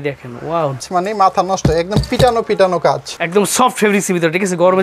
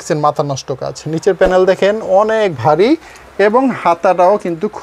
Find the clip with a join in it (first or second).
first